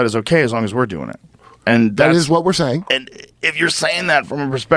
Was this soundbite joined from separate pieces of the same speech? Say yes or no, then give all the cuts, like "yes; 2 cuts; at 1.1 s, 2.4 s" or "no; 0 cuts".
yes; 1 cut; at 1.5 s